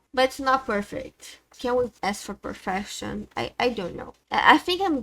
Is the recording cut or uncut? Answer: uncut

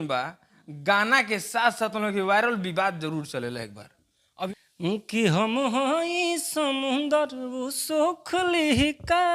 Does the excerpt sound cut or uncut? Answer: cut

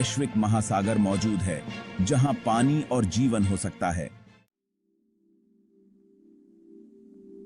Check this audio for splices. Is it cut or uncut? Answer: uncut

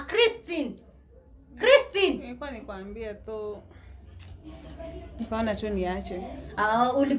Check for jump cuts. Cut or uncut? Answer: uncut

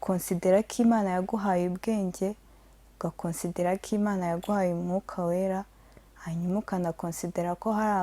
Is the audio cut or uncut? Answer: uncut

